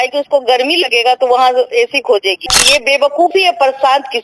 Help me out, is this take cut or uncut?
cut